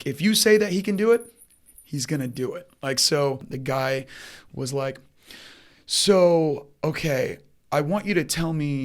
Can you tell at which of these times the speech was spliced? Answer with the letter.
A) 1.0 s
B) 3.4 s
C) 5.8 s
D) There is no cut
B